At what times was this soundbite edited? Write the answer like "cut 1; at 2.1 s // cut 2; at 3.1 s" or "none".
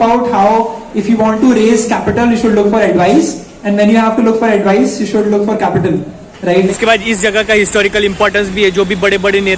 cut 1; at 6.7 s